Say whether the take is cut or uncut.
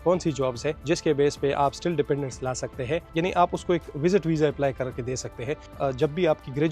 cut